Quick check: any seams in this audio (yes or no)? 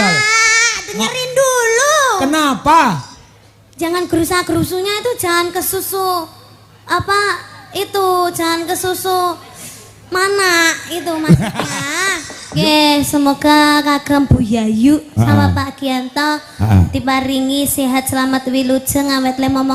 yes